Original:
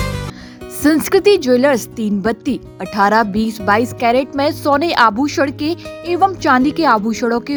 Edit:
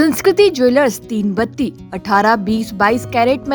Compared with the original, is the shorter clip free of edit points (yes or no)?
yes